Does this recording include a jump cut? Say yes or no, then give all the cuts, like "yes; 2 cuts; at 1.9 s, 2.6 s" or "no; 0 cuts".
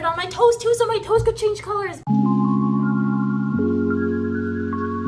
no; 0 cuts